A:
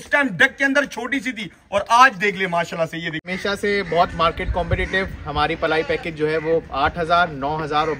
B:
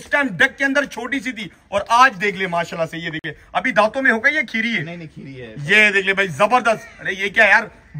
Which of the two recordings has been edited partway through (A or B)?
A